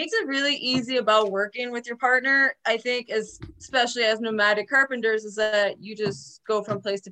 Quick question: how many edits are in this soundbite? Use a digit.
0